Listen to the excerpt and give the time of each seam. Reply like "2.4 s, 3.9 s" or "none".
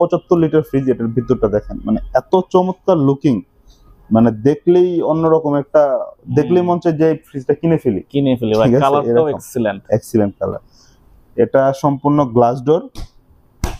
none